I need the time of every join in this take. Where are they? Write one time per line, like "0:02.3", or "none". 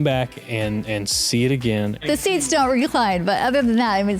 0:02.1